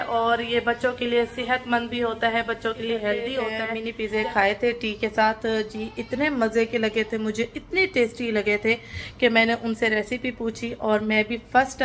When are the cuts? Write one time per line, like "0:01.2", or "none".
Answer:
0:03.6